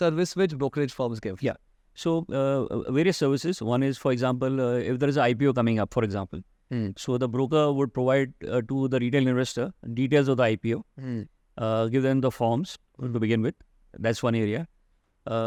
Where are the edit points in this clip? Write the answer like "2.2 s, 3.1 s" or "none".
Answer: none